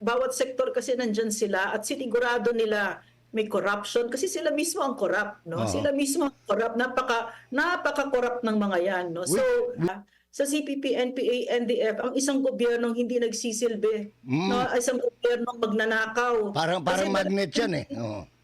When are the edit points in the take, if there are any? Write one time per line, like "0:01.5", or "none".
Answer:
0:10.0